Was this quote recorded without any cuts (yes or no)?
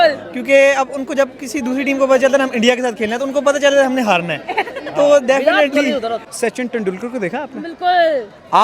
no